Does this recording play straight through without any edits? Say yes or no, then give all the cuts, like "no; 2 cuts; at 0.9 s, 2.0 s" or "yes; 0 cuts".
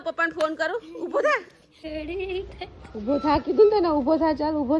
yes; 0 cuts